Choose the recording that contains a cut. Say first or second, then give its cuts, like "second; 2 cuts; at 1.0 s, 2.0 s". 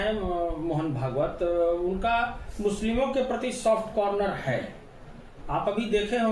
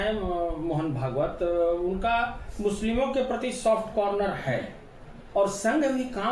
second; 1 cut; at 5.2 s